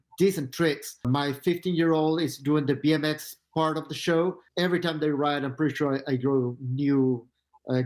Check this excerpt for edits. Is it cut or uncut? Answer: cut